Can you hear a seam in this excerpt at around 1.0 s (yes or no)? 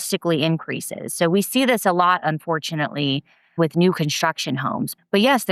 no